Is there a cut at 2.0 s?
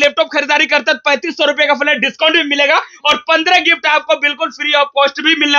no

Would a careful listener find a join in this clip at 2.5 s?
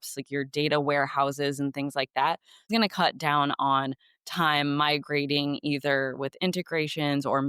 yes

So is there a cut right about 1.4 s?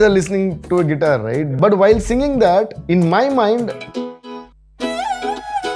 yes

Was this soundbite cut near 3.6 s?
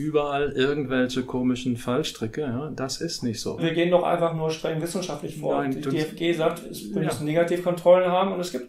yes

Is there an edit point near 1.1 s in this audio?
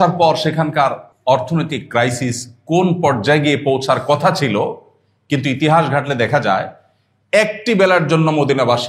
yes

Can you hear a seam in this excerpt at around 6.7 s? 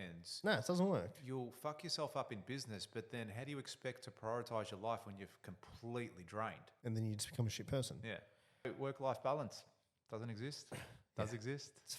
yes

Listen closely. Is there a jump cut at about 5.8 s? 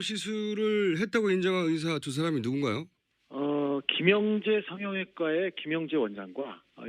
no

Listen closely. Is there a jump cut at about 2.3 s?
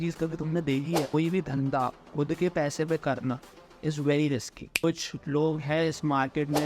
no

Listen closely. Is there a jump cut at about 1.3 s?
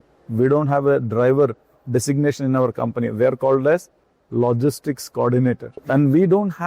no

